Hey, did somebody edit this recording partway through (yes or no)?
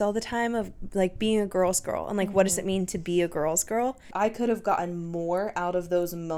yes